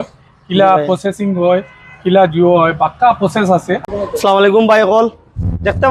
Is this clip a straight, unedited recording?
no; 1 cut; at 3.8 s

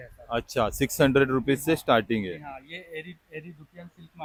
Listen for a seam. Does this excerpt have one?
no; 0 cuts

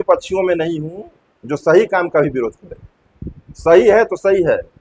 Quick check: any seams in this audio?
no; 0 cuts

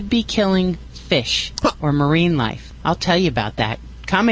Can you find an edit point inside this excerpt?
yes; 1 cut; at 2.7 s

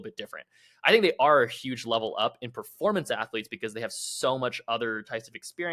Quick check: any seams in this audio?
no; 0 cuts

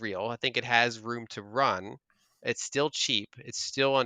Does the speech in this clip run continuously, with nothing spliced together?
yes; 0 cuts

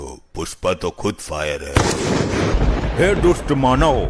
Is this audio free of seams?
no; 1 cut; at 2.5 s

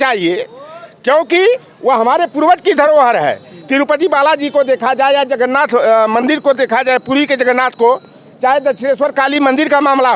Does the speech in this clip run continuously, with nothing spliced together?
yes; 0 cuts

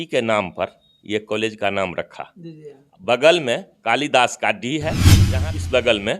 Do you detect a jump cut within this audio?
yes; 1 cut; at 5.1 s

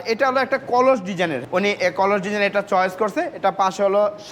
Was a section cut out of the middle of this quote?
yes; 1 cut; at 1.4 s

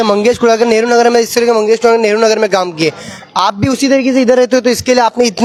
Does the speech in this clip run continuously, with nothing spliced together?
yes; 0 cuts

